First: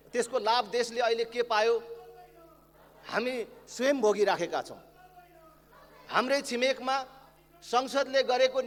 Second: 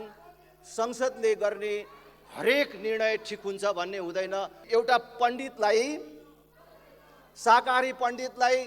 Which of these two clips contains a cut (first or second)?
second